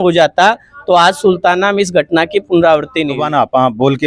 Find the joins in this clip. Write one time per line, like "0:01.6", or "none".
0:03.1